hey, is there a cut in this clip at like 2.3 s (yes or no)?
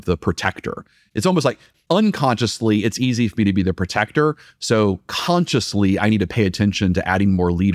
no